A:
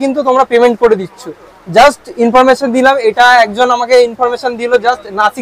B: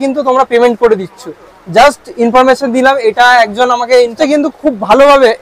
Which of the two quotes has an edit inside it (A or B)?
B